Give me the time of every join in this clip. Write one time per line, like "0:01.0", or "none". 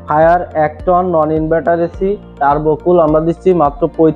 none